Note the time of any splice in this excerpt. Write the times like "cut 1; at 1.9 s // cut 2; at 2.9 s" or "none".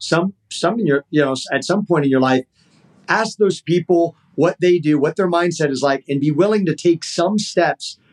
none